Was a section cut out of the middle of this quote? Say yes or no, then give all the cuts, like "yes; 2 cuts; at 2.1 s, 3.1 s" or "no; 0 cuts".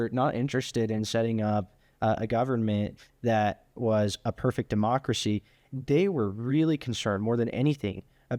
no; 0 cuts